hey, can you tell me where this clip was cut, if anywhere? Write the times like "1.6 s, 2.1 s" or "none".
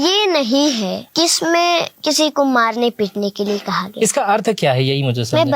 1.0 s, 1.9 s

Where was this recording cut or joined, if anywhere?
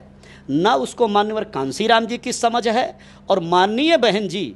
none

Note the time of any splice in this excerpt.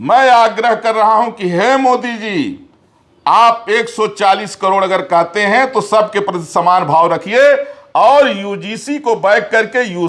none

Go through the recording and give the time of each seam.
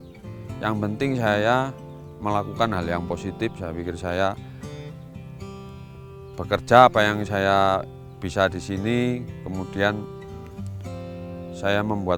none

